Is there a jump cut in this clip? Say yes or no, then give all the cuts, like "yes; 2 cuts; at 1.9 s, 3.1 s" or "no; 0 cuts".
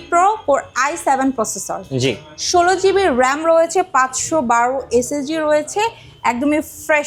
no; 0 cuts